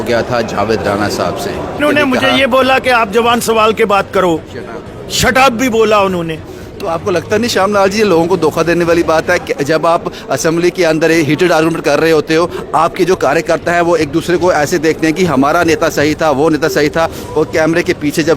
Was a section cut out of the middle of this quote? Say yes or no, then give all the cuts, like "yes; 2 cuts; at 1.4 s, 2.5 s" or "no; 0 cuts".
yes; 2 cuts; at 1.8 s, 6.8 s